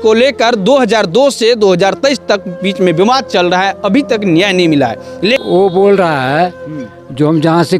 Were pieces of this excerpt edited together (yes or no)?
yes